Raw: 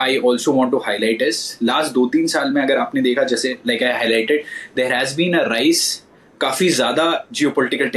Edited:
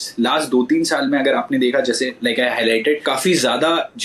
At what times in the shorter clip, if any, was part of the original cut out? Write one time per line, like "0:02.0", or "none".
0:03.0